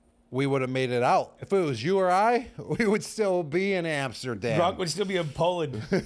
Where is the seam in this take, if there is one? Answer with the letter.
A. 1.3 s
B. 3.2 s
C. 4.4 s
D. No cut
A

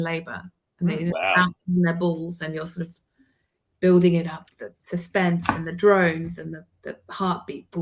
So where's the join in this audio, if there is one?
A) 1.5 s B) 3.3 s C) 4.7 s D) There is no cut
D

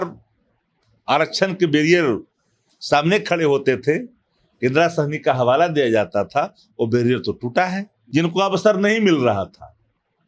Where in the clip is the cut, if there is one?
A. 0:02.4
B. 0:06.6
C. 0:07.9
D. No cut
C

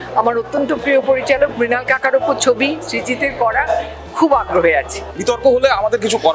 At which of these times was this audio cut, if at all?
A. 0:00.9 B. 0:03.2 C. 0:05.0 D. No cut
C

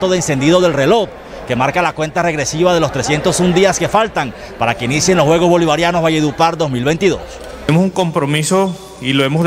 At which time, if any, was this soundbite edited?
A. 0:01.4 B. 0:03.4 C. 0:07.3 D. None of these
D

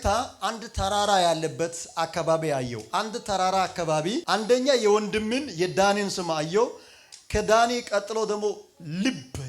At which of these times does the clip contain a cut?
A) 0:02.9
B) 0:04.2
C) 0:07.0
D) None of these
B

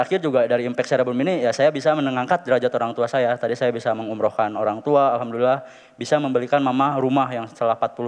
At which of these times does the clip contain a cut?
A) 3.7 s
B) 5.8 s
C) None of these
C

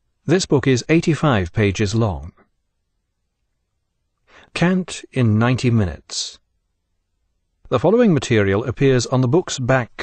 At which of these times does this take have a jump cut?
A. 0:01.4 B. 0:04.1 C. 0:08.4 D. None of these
A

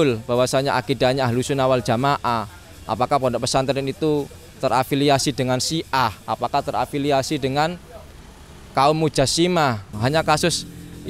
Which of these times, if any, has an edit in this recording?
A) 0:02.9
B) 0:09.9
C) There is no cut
B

